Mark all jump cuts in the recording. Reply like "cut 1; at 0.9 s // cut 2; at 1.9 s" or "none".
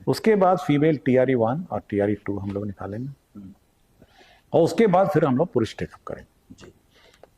none